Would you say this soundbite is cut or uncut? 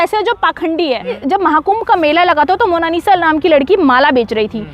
cut